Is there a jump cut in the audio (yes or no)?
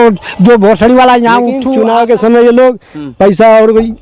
yes